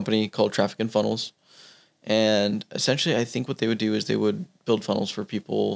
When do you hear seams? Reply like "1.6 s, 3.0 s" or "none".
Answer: none